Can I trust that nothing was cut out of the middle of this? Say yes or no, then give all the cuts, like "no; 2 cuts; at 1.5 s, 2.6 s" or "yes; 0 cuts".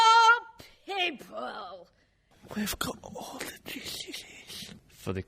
yes; 0 cuts